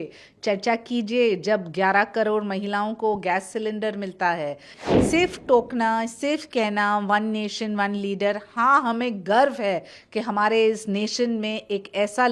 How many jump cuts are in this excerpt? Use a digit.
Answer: 1